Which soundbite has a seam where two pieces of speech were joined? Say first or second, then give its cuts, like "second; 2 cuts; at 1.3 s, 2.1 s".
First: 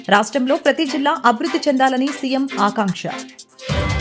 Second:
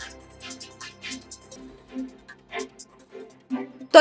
second; 1 cut; at 1.2 s